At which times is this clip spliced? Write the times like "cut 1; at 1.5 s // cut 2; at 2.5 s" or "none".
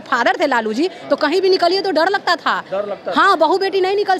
none